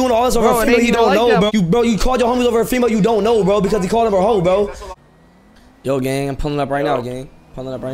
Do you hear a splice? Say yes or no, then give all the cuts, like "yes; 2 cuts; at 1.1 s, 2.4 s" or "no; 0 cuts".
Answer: yes; 2 cuts; at 1.5 s, 4.9 s